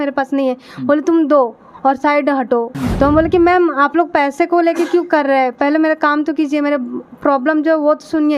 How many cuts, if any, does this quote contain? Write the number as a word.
one